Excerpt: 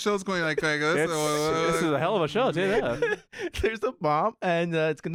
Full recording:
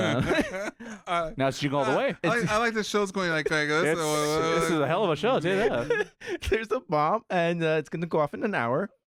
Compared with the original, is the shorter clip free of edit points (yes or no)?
yes